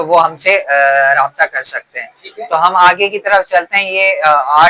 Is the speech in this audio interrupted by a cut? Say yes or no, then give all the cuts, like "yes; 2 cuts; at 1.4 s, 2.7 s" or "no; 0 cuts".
no; 0 cuts